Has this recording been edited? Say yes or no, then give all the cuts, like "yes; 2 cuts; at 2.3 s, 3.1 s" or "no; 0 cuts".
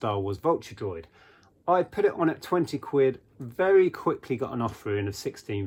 no; 0 cuts